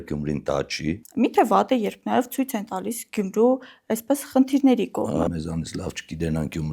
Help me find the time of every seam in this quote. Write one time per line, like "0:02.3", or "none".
0:01.0
0:05.3